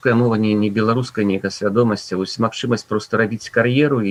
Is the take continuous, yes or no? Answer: yes